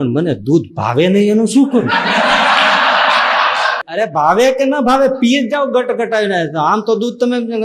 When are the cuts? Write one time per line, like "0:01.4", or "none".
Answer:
0:03.8